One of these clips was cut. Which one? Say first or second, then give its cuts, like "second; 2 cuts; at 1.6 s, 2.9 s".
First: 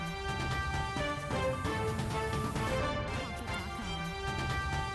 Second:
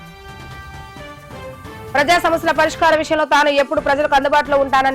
second; 1 cut; at 1.9 s